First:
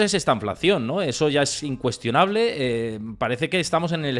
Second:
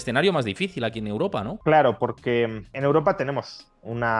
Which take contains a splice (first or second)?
second